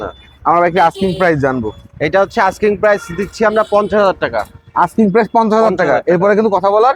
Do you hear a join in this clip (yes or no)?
no